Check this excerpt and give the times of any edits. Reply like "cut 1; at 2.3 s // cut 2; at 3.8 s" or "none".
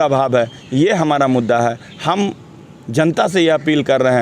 none